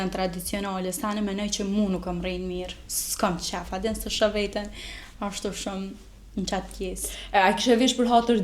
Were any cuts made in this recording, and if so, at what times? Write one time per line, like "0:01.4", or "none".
none